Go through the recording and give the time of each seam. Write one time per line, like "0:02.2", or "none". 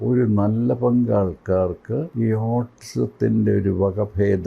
0:02.1